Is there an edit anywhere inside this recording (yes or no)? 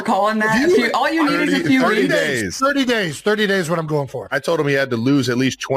yes